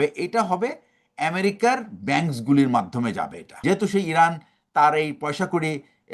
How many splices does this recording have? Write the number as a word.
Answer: one